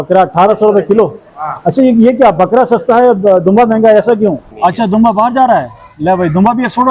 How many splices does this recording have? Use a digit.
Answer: 1